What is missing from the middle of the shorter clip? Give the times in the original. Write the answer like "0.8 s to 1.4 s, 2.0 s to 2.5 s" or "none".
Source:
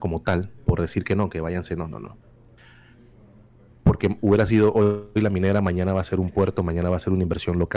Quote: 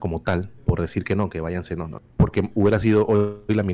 2.0 s to 3.7 s